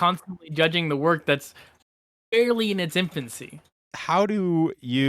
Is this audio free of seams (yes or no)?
no